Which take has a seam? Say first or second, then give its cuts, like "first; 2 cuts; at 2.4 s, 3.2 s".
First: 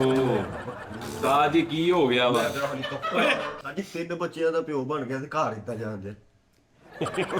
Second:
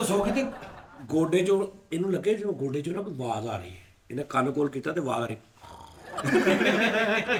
first; 1 cut; at 3.5 s